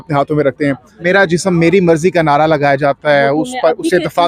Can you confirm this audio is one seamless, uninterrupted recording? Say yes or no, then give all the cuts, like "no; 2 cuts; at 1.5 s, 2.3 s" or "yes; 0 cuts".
no; 1 cut; at 0.9 s